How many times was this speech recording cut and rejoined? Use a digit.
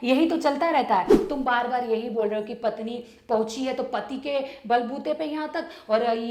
1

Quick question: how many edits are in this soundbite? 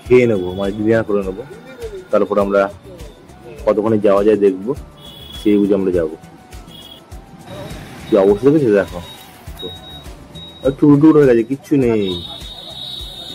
0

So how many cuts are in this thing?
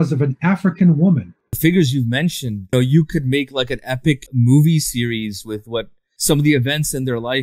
4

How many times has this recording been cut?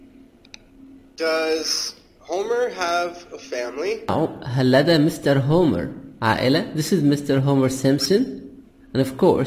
1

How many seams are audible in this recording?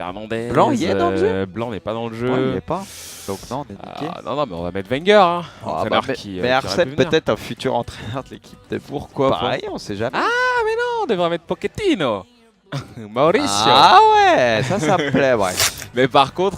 1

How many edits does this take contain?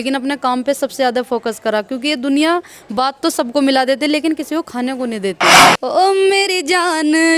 1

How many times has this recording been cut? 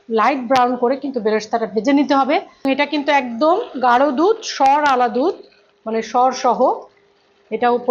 1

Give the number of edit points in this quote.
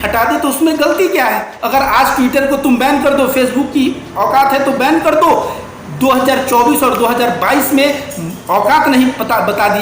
1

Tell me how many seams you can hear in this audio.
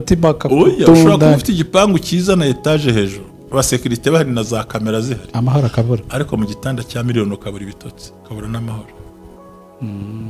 0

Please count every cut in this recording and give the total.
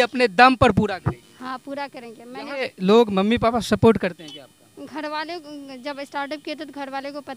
1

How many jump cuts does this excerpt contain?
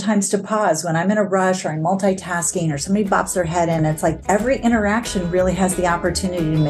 1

